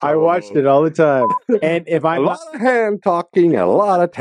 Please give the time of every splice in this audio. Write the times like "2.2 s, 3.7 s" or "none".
1.4 s